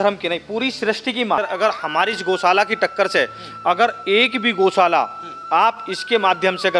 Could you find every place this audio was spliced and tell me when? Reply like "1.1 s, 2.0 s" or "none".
1.4 s